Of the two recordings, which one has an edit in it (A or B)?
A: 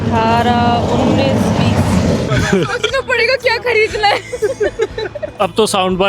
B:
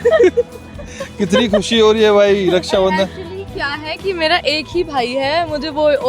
A